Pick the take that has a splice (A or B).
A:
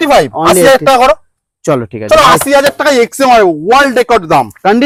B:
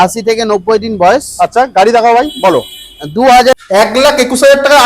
B